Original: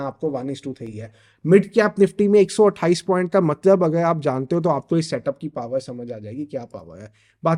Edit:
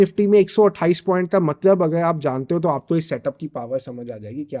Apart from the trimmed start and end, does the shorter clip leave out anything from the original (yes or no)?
no